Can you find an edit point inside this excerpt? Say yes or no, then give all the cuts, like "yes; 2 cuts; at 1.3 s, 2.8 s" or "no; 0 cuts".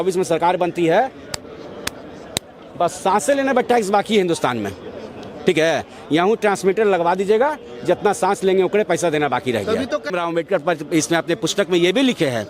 yes; 1 cut; at 10.1 s